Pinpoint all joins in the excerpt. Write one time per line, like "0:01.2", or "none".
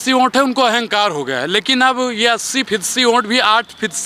0:02.7